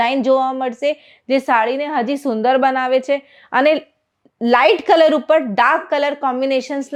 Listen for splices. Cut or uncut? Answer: uncut